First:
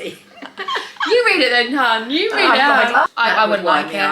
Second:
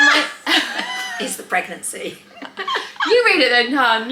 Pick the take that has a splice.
first; 1 cut; at 3.1 s

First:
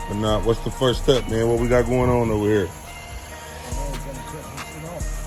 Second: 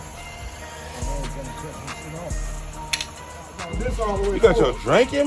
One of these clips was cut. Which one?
second; 1 cut; at 3.6 s

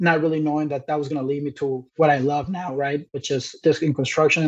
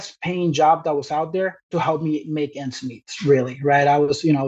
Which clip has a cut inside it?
first; 2 cuts; at 1.9 s, 3.6 s

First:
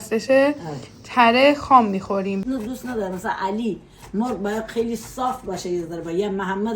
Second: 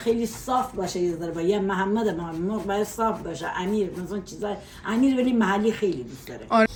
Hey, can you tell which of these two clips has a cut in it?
first; 1 cut; at 2.4 s

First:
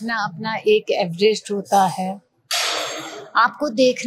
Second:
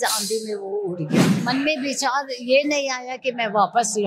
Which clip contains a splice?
second; 1 cut; at 1.4 s

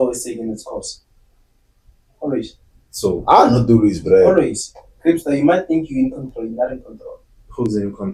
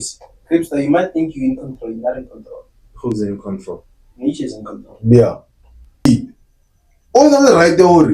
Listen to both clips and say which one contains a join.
second; 1 cut; at 6.1 s

